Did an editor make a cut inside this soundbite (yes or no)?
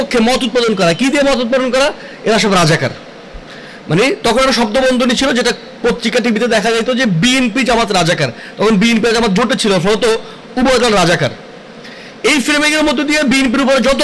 no